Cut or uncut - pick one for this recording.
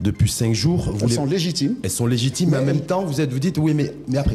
uncut